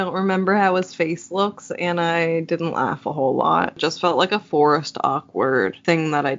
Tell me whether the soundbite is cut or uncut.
cut